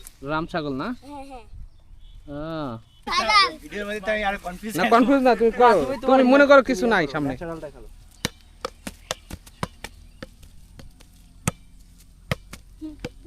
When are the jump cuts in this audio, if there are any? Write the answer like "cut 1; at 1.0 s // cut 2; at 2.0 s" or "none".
cut 1; at 2.9 s

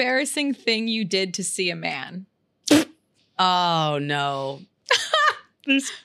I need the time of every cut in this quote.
cut 1; at 3.2 s // cut 2; at 4.7 s

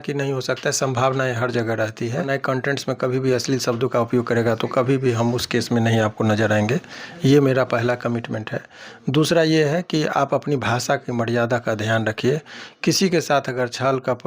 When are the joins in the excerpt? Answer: cut 1; at 2.3 s

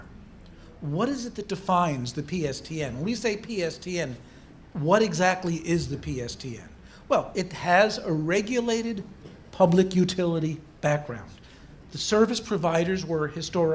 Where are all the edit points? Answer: cut 1; at 12.3 s

